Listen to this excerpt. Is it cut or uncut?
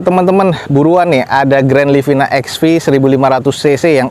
uncut